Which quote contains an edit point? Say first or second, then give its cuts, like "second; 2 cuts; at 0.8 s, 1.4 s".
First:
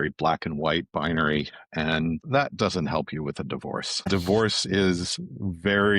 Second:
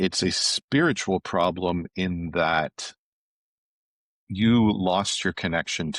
first; 2 cuts; at 2.2 s, 4.1 s